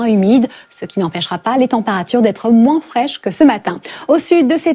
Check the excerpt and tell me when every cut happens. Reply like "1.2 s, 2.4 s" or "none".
1.7 s

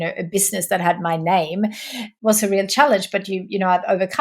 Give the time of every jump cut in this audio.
2.1 s

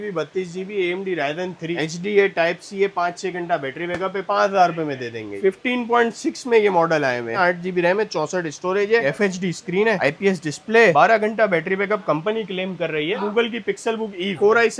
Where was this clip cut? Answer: 1.7 s, 4.2 s, 5.4 s, 7.4 s, 9.0 s, 13.2 s

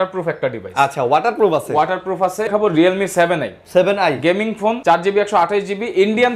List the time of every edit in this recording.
2.5 s, 4.8 s

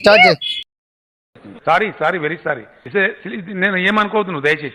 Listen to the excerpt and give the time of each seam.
1.1 s

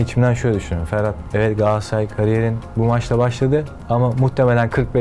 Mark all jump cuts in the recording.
1.2 s, 3.7 s

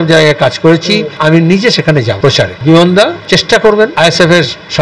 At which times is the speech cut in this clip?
1.1 s, 2.5 s, 3.2 s, 3.9 s

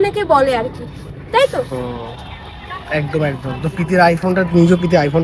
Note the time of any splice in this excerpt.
none

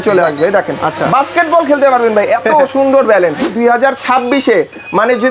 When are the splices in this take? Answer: 3.5 s

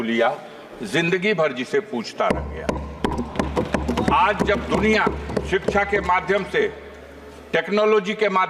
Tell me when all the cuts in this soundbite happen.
none

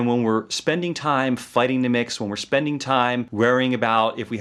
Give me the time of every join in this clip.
none

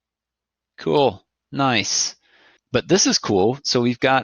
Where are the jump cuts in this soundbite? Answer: 2.6 s

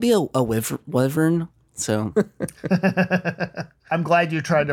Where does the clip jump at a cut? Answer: 2.1 s

